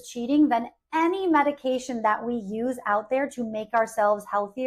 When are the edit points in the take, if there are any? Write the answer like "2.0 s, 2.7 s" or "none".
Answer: none